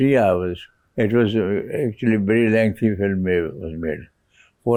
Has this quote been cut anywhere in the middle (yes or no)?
no